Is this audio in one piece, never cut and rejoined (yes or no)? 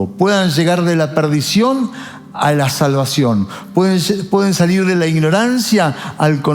yes